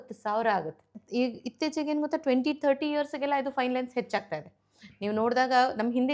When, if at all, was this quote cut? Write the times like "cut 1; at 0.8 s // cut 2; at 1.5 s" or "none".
cut 1; at 1.0 s